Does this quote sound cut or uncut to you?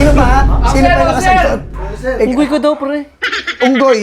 uncut